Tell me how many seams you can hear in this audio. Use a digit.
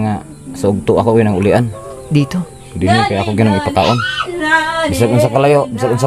0